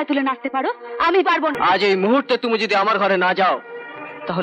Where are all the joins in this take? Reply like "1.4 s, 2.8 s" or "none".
1.6 s